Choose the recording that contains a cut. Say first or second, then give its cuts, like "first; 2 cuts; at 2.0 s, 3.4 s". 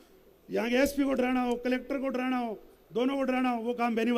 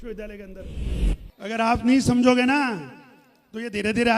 second; 1 cut; at 0.9 s